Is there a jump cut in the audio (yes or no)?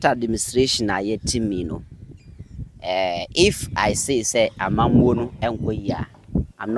no